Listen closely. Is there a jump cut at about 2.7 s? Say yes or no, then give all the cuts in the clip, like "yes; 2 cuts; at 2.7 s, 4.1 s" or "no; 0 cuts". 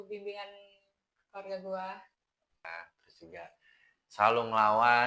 yes; 1 cut; at 2.7 s